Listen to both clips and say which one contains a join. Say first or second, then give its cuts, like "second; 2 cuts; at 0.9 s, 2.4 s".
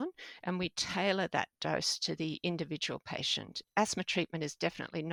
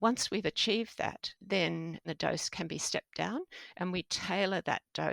second; 1 cut; at 2.0 s